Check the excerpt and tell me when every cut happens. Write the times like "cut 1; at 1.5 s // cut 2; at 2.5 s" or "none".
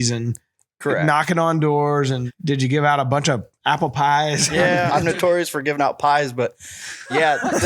cut 1; at 2.2 s // cut 2; at 4.9 s